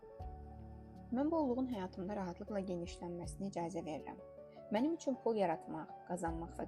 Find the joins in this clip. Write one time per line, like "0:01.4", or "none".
0:01.1

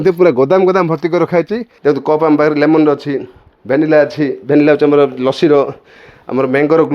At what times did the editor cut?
0:01.6

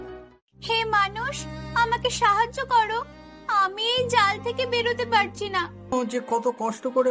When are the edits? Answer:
0:05.9

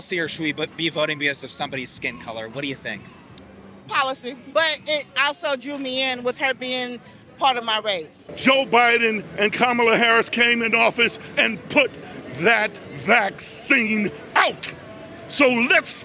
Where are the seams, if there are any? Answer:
0:04.5
0:08.2

